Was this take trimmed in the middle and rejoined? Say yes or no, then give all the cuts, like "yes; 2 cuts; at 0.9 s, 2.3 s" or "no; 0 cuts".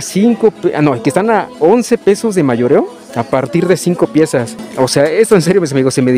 yes; 1 cut; at 4.6 s